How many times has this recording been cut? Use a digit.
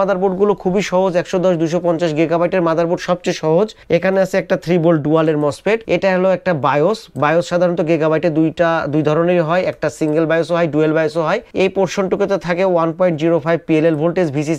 1